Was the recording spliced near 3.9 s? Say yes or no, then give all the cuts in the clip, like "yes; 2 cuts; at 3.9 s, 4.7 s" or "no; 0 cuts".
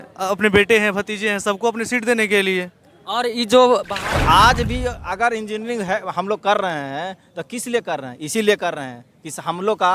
yes; 1 cut; at 3.9 s